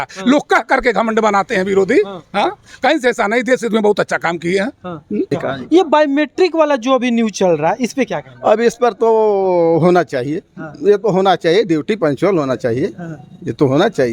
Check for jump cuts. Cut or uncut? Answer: cut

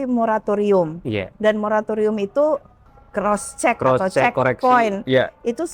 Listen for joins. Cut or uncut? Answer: cut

